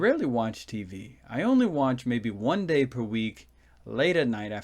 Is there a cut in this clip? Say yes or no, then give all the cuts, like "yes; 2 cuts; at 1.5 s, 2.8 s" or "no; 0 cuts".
yes; 1 cut; at 2.9 s